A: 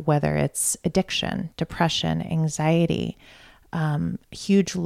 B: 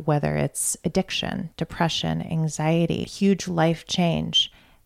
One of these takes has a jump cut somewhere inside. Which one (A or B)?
B